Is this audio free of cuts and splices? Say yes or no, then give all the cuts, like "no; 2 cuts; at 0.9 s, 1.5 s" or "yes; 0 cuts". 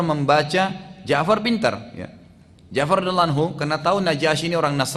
yes; 0 cuts